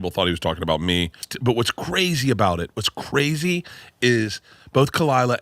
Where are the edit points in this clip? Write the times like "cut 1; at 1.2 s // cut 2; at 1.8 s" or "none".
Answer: cut 1; at 1.3 s